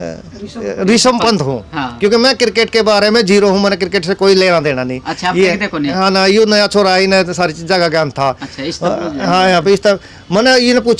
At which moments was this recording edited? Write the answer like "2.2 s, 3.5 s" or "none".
none